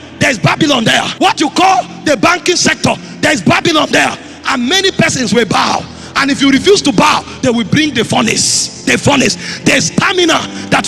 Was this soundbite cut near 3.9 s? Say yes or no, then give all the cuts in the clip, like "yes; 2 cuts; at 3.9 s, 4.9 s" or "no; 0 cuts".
no; 1 cut; at 1.1 s